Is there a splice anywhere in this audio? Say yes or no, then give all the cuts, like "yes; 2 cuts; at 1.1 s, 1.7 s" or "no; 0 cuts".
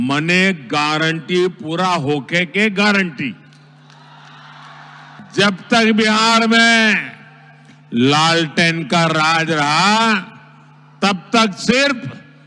yes; 1 cut; at 5.2 s